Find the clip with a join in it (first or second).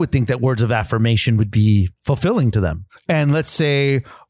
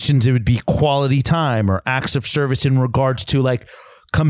first